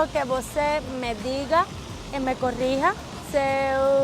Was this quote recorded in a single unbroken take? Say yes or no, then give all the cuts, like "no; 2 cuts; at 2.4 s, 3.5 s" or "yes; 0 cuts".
no; 1 cut; at 3.1 s